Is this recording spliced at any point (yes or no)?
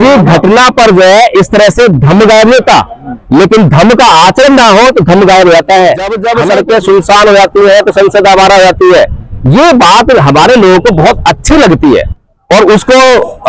yes